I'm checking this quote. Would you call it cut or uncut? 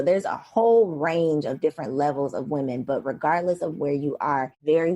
uncut